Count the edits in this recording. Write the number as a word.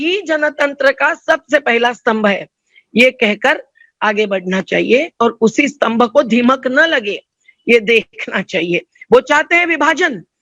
zero